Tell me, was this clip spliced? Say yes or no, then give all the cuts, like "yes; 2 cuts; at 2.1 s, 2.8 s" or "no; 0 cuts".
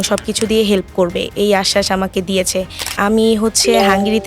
yes; 1 cut; at 2.9 s